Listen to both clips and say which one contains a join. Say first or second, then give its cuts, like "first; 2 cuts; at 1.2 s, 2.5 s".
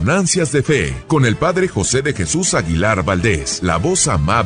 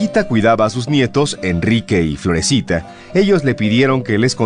first; 2 cuts; at 0.9 s, 3.5 s